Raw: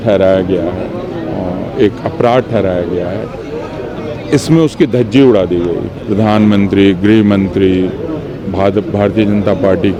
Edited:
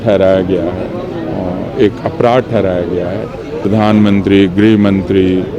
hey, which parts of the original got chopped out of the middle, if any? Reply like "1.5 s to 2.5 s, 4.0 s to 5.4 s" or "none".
3.5 s to 6.0 s